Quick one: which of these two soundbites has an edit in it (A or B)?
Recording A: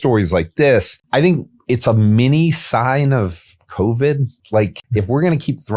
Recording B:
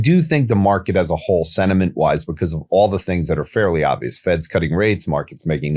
A